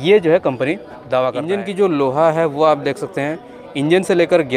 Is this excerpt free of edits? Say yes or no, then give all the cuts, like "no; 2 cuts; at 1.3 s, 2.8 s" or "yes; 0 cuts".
no; 1 cut; at 1.5 s